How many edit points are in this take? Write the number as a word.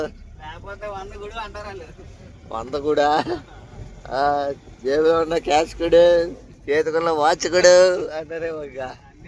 zero